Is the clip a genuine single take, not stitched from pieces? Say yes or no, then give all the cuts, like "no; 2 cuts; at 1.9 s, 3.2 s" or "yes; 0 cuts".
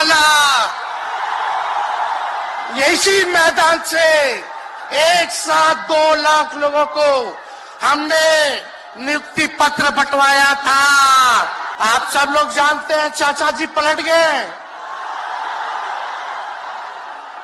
no; 1 cut; at 11.6 s